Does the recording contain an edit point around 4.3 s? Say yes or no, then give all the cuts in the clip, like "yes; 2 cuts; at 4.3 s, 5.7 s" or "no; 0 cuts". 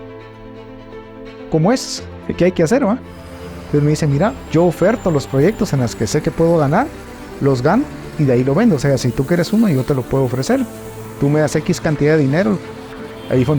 yes; 2 cuts; at 4.3 s, 12.7 s